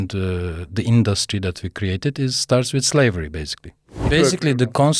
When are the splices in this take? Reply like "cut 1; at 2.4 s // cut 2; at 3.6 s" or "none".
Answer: cut 1; at 3.9 s